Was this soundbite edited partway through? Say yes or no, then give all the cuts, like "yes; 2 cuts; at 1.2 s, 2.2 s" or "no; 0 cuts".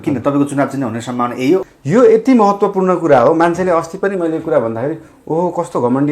yes; 1 cut; at 1.7 s